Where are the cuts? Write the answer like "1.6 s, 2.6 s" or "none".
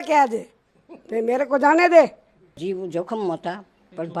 2.6 s